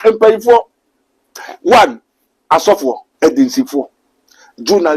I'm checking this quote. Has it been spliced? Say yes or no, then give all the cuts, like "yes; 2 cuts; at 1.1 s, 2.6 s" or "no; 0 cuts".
yes; 1 cut; at 3.1 s